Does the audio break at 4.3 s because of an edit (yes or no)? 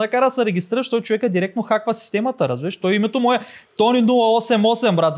no